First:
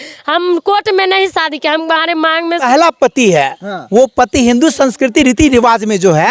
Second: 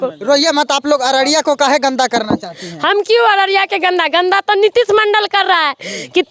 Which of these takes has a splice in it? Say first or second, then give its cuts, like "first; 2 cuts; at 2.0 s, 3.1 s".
first; 1 cut; at 2.6 s